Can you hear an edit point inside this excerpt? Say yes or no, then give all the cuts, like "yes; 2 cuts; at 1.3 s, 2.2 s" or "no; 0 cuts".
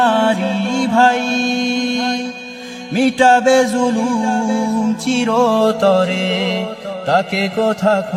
no; 0 cuts